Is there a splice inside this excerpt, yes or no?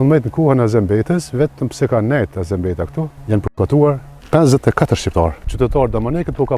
yes